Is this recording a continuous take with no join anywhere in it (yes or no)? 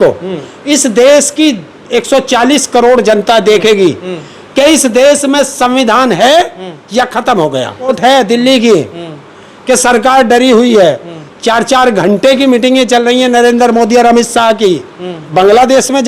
no